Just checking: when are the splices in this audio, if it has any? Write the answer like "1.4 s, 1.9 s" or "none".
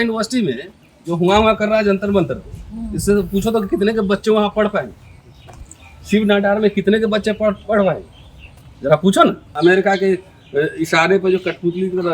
9.5 s